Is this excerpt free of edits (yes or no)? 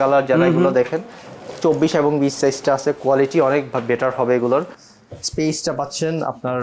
yes